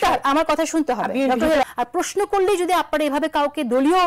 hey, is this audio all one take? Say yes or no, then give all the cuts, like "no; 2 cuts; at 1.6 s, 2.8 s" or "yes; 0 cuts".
no; 1 cut; at 1.6 s